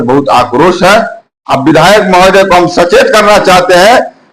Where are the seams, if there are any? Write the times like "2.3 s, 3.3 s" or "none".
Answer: 1.3 s